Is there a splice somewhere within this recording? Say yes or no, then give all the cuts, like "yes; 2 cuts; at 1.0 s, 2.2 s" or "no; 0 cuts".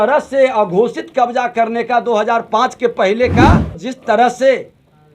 yes; 1 cut; at 3.8 s